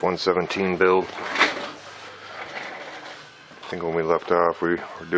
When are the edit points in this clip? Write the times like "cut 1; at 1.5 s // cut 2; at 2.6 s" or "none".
none